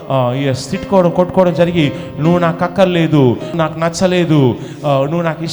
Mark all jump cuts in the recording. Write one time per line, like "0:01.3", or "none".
0:03.6